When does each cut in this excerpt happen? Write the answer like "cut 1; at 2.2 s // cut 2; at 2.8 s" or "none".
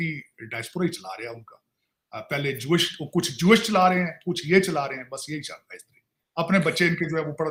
none